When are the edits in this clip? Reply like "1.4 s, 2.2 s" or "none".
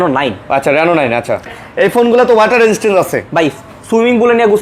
1.6 s